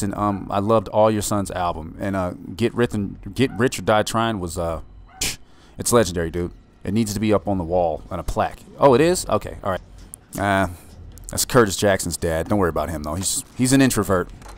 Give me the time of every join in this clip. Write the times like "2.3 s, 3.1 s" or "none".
9.9 s